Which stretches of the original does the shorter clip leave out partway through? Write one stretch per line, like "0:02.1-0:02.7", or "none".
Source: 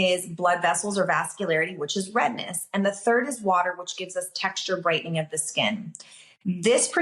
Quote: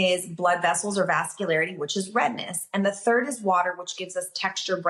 none